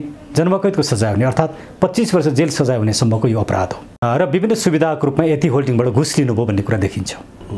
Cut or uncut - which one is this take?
cut